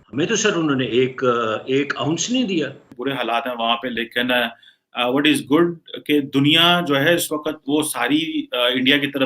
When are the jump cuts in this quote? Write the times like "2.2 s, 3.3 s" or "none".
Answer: 3.0 s